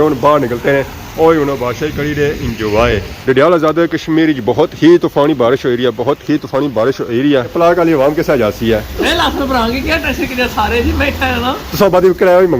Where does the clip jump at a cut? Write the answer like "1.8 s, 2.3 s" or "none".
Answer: 3.2 s, 7.5 s